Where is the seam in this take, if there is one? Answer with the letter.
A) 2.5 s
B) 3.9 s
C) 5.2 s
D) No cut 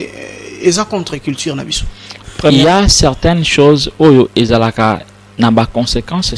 A